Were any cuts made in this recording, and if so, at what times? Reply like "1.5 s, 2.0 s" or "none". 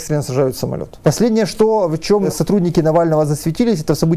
0.9 s, 2.3 s